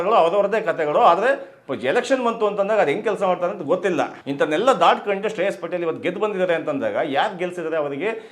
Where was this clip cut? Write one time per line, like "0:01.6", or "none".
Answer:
0:04.2